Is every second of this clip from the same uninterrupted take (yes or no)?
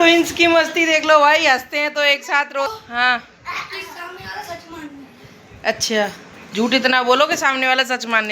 no